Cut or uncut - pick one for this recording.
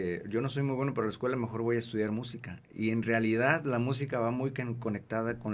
uncut